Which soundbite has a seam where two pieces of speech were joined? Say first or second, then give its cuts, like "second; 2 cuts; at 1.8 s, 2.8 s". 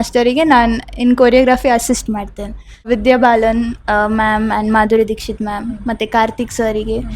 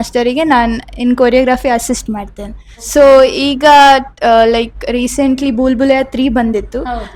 first; 1 cut; at 2.9 s